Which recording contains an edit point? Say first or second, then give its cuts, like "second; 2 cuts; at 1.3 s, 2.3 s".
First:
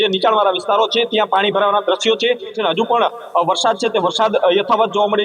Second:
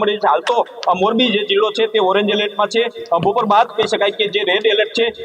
first; 1 cut; at 2.6 s